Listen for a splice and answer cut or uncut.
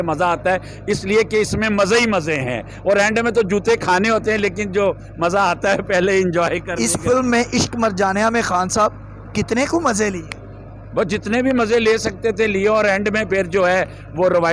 uncut